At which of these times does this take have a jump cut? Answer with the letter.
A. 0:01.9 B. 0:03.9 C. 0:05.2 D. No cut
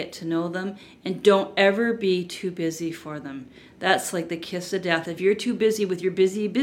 C